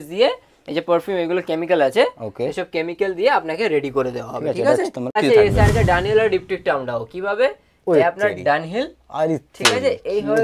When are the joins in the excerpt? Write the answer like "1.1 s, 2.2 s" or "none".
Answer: 5.2 s